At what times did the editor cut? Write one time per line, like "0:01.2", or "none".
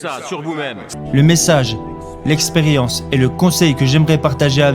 0:00.9